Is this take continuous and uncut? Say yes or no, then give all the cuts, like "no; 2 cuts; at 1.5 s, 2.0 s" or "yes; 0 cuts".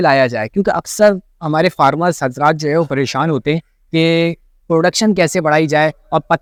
yes; 0 cuts